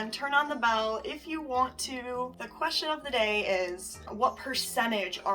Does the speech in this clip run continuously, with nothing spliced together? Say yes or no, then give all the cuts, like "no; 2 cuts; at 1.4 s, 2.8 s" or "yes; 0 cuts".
no; 2 cuts; at 2.4 s, 4.1 s